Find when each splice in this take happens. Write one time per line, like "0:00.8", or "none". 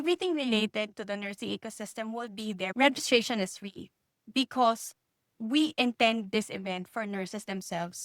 0:02.7